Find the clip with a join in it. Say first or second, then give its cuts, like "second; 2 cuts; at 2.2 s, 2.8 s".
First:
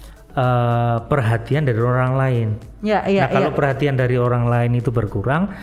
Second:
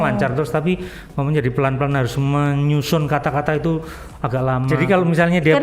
second; 1 cut; at 4.7 s